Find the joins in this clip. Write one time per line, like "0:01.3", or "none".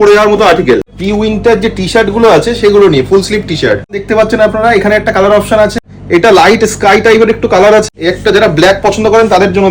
0:01.0
0:04.0
0:05.9
0:07.8